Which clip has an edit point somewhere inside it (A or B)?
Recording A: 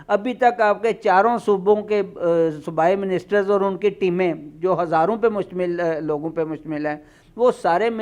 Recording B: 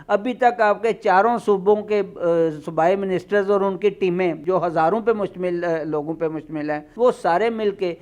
B